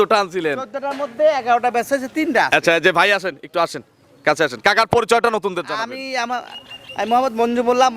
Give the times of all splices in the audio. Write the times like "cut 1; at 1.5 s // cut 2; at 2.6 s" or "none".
none